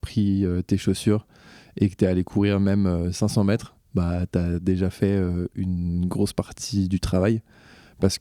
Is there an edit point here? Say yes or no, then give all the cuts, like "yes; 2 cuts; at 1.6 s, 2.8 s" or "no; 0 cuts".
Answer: no; 0 cuts